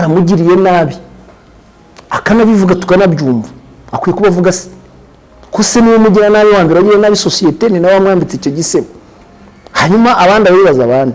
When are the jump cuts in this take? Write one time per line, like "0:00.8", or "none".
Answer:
none

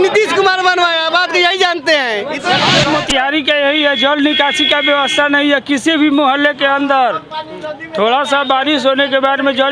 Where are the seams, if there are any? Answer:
0:02.9

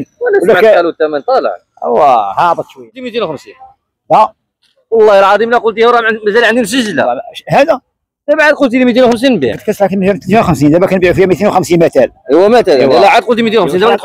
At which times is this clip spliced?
0:03.1

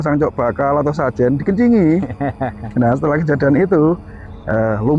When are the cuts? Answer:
none

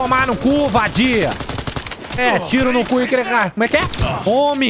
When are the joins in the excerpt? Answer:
0:03.5

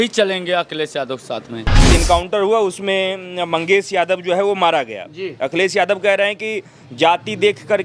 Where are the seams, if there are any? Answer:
0:01.9

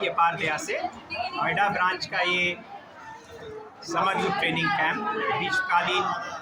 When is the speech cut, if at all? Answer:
none

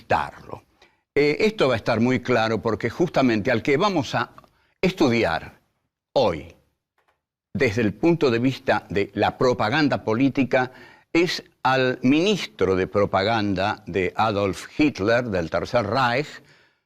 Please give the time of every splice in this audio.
none

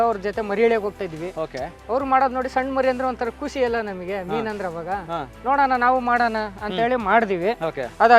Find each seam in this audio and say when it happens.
none

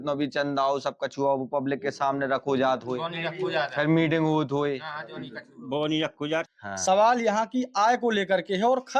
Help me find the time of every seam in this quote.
0:06.5

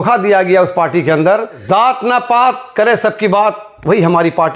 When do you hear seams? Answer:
0:01.6

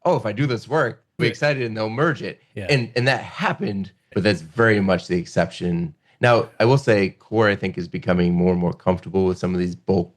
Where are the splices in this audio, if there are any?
0:01.2
0:04.0

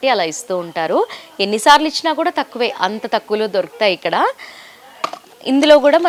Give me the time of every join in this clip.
none

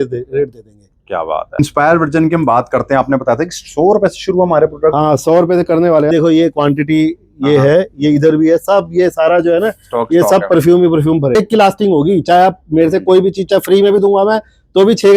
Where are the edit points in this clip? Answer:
0:01.6
0:06.1
0:11.3

